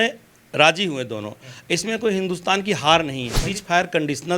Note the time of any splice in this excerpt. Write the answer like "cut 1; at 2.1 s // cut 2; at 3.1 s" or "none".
cut 1; at 3.4 s